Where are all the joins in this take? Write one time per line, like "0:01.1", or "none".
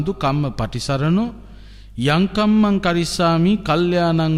none